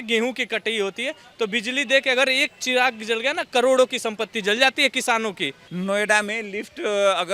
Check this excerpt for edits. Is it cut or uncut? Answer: cut